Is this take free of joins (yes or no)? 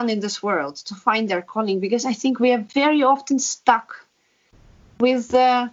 yes